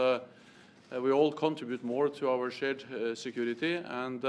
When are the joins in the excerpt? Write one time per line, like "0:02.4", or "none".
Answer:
0:02.3